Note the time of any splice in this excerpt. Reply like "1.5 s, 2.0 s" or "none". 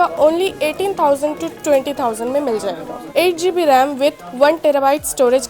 2.9 s